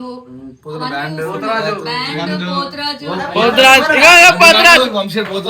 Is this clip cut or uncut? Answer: uncut